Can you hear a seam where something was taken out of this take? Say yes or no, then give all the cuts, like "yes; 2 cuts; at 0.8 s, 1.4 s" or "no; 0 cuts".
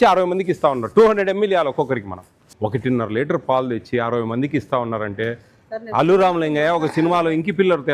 yes; 1 cut; at 2.3 s